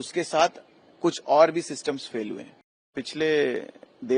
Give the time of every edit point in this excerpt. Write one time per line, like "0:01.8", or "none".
0:02.9